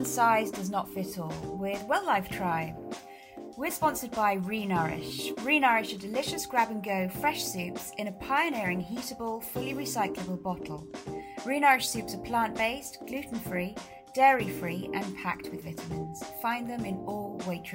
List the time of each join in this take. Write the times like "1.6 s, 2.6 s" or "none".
none